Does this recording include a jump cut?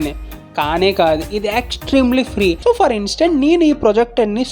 yes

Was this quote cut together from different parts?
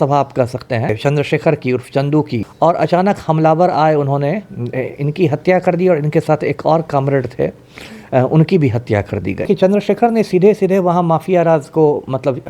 yes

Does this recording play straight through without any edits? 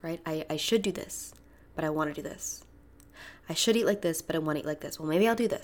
yes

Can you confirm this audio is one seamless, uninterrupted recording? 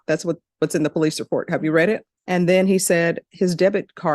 no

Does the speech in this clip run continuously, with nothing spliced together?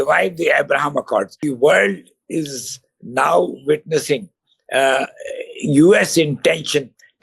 no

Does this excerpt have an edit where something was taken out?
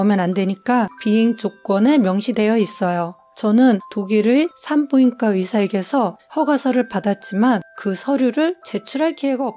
yes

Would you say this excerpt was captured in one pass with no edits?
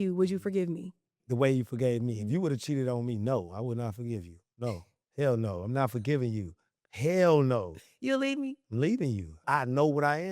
no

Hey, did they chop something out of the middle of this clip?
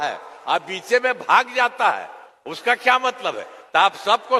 no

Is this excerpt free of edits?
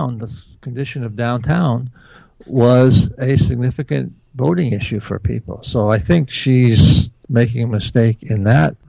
yes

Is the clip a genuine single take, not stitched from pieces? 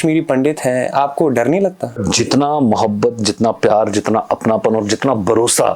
no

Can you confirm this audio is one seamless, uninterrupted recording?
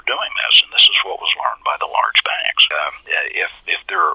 no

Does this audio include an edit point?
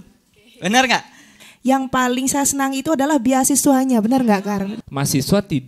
yes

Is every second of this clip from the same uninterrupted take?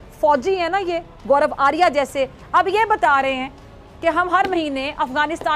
yes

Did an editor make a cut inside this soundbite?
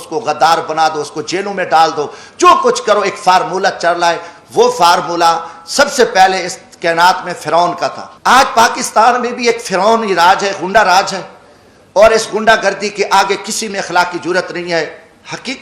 yes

